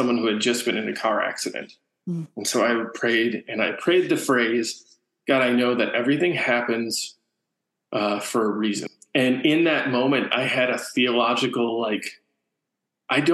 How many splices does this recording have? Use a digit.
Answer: 1